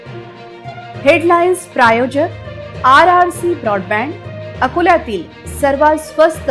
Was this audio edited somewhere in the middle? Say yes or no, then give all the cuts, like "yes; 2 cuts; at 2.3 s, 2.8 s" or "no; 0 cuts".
no; 0 cuts